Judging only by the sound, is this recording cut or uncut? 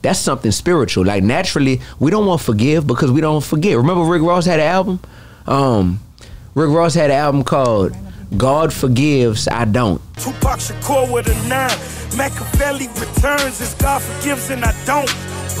uncut